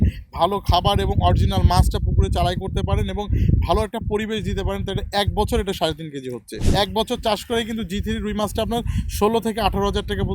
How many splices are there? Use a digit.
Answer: 1